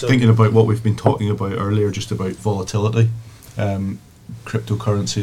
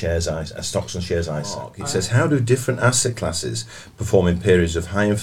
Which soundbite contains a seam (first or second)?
second